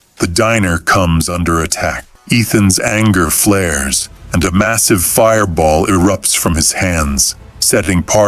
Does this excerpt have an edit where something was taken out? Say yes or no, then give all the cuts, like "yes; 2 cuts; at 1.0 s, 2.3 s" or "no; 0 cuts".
yes; 1 cut; at 2.1 s